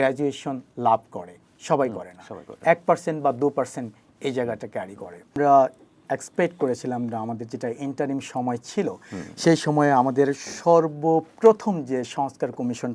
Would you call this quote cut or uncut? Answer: cut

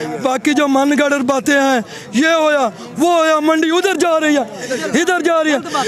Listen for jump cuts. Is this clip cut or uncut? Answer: uncut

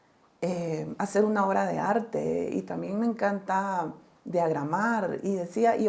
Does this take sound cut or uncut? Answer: uncut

